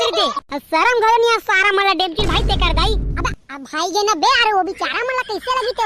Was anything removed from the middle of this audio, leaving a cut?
no; 0 cuts

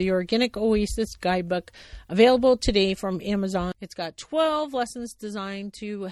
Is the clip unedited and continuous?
no; 1 cut; at 3.7 s

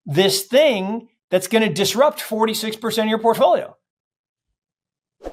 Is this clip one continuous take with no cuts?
yes; 0 cuts

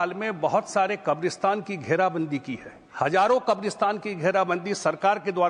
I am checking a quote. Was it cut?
no; 0 cuts

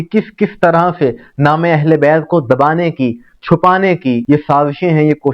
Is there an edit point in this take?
yes; 1 cut; at 4.2 s

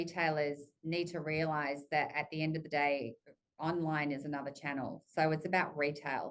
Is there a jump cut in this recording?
no; 0 cuts

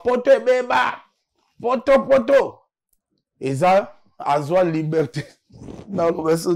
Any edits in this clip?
no; 0 cuts

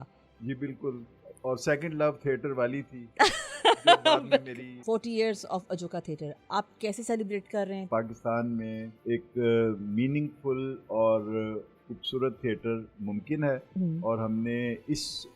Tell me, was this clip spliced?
yes; 3 cuts; at 4.7 s, 7.9 s, 8.9 s

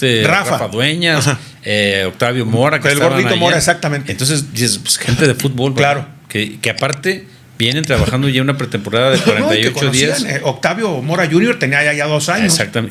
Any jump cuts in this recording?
no; 0 cuts

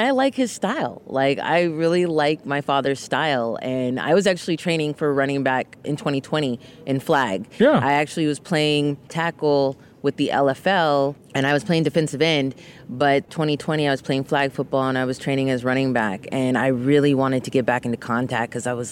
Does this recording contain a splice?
yes; 4 cuts; at 5.7 s, 9.1 s, 11.2 s, 13.3 s

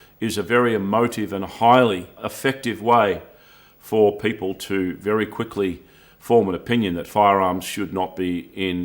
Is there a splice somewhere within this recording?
yes; 1 cut; at 2.2 s

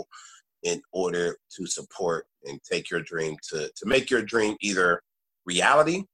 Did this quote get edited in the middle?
no; 0 cuts

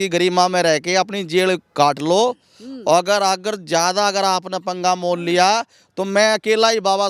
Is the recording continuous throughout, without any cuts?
yes; 0 cuts

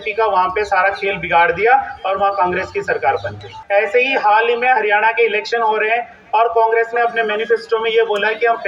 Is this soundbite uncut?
no; 1 cut; at 3.5 s

